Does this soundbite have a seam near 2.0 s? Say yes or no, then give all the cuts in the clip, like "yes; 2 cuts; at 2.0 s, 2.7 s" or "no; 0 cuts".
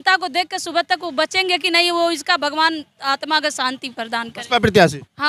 no; 0 cuts